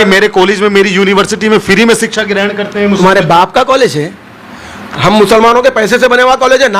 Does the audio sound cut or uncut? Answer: uncut